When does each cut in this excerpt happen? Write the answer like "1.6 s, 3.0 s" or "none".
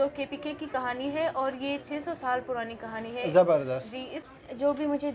4.2 s